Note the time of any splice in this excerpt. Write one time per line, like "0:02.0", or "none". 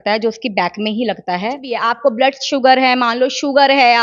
0:01.7